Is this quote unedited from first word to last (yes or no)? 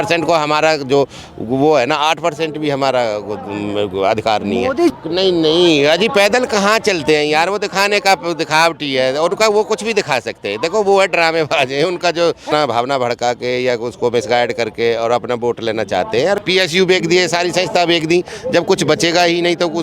no